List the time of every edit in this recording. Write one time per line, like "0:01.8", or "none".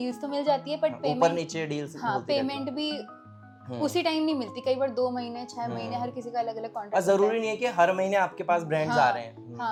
none